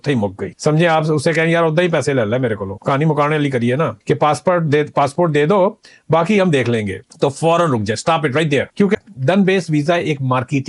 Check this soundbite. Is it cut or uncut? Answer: cut